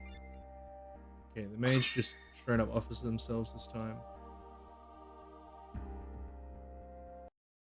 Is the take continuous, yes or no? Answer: yes